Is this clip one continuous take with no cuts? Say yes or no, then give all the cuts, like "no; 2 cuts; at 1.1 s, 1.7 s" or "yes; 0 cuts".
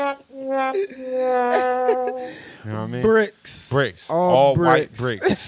yes; 0 cuts